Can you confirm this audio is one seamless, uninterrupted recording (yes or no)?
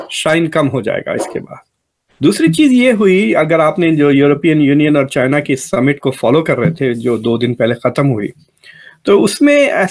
yes